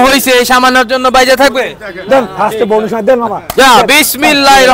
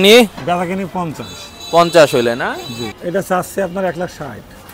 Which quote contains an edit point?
second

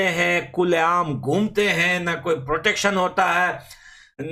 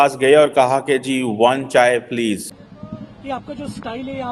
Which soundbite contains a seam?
second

